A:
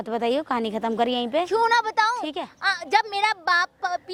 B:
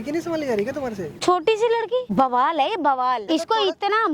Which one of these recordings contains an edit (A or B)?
B